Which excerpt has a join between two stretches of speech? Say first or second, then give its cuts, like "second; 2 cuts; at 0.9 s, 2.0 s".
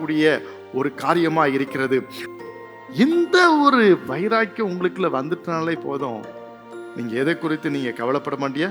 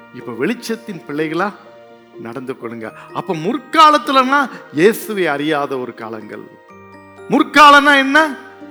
first; 1 cut; at 2.2 s